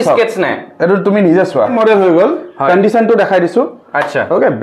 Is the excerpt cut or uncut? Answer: cut